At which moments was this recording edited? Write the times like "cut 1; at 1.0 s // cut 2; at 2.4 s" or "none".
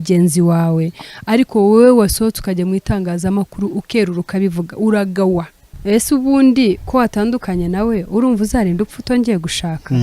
cut 1; at 5.7 s